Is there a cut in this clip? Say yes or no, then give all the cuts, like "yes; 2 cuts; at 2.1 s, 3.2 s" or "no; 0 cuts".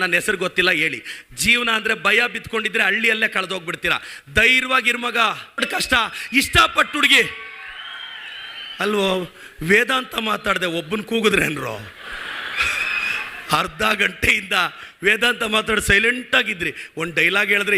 yes; 1 cut; at 5.6 s